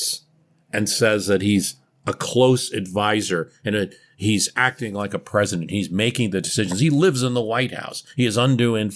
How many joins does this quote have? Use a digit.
0